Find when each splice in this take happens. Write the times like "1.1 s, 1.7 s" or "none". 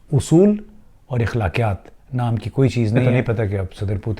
3.1 s